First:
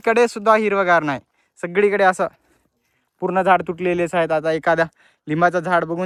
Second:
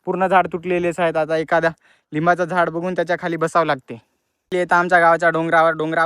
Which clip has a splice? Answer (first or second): second